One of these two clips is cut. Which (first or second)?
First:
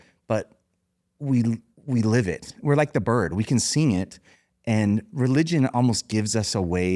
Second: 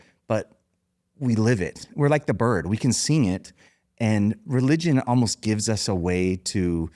second